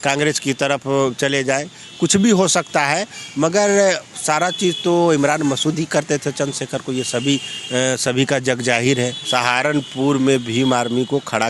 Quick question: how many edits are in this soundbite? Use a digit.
1